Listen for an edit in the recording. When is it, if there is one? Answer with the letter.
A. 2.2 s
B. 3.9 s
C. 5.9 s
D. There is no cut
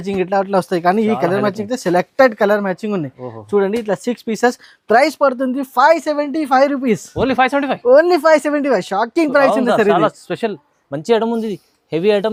D